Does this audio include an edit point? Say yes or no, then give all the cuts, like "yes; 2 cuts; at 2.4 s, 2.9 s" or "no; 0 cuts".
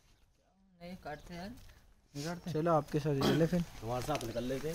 no; 0 cuts